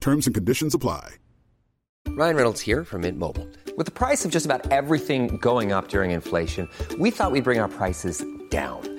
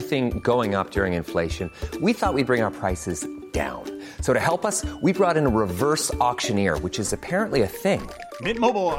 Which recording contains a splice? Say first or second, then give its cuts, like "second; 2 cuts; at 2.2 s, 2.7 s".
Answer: first; 1 cut; at 1.9 s